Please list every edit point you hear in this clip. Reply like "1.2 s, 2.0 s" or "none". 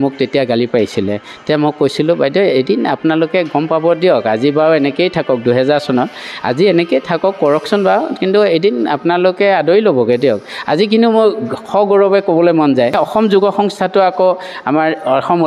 13.0 s